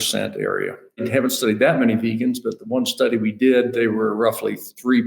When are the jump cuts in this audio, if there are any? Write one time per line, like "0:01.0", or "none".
0:01.1